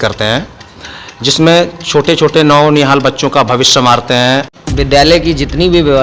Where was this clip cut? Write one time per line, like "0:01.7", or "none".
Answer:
0:04.5